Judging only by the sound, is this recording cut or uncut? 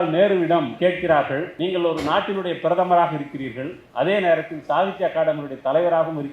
cut